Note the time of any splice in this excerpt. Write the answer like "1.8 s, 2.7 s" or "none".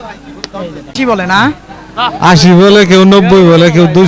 0.9 s